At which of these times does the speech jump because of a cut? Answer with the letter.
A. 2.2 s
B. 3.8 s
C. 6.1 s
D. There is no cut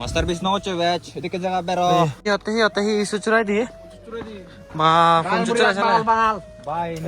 A